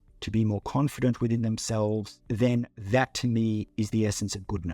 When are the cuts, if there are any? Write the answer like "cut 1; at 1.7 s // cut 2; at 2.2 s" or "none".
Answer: cut 1; at 2.1 s // cut 2; at 2.8 s // cut 3; at 3.7 s